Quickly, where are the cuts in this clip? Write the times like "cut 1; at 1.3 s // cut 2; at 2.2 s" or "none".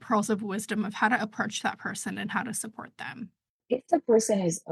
cut 1; at 3.6 s